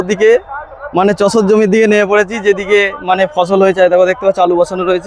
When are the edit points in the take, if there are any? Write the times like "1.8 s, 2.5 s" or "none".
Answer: none